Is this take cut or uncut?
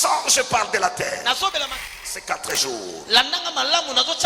cut